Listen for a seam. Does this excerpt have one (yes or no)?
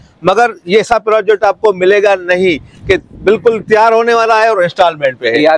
no